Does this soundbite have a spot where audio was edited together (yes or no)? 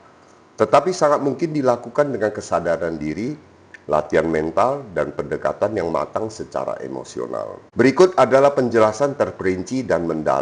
yes